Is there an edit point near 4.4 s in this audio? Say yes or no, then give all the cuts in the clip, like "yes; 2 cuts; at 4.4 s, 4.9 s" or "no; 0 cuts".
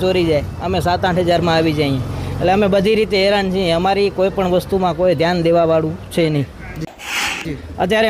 no; 1 cut; at 7.1 s